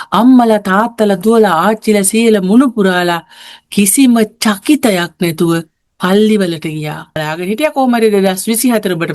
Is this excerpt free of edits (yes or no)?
no